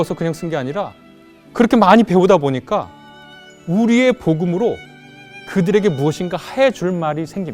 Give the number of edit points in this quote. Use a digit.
0